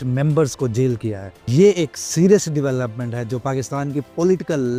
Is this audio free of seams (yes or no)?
yes